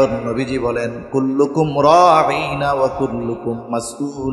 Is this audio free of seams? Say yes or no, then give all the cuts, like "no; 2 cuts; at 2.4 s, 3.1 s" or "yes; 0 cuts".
yes; 0 cuts